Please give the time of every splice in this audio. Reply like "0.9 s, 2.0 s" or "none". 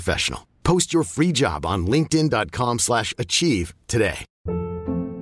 4.3 s